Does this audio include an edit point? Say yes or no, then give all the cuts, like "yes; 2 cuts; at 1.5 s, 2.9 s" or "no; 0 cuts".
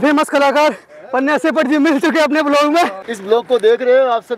yes; 1 cut; at 3.0 s